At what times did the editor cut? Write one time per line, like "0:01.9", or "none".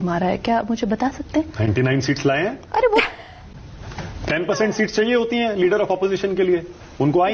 0:03.1